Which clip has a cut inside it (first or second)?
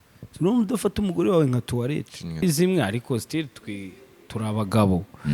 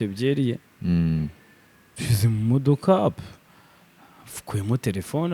first